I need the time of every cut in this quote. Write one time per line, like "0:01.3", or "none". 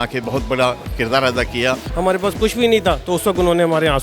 0:01.9